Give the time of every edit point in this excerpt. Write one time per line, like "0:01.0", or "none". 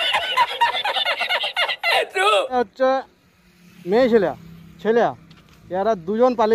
0:02.5